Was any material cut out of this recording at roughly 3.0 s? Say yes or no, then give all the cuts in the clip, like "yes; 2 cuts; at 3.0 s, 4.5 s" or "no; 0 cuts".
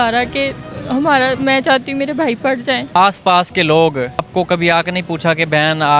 yes; 2 cuts; at 3.0 s, 4.3 s